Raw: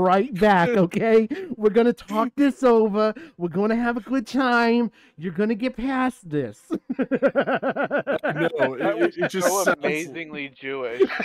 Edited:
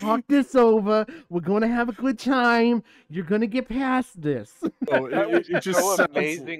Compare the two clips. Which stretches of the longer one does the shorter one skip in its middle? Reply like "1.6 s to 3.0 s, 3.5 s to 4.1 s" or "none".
6.9 s to 8.5 s